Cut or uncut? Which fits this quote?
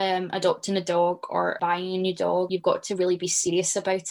cut